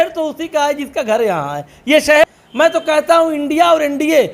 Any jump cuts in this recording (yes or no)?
yes